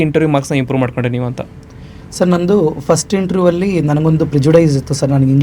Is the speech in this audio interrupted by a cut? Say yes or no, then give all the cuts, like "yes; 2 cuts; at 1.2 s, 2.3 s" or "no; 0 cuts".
no; 0 cuts